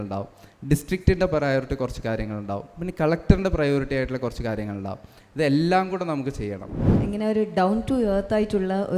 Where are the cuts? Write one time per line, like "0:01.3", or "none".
0:07.0